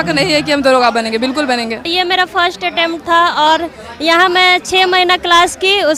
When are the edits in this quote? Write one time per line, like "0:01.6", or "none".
none